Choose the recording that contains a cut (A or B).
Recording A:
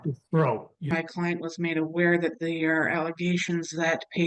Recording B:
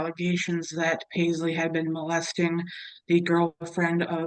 A